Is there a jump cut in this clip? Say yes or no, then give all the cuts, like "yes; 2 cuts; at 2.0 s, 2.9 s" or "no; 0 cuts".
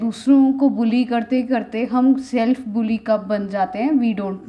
no; 0 cuts